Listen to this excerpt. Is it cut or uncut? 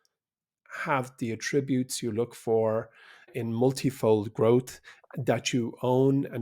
cut